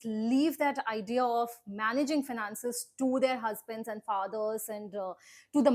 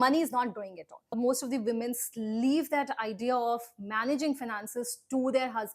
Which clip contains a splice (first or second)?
second